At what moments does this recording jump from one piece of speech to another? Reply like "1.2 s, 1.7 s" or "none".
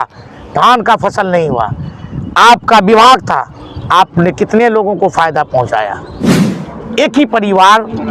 6.4 s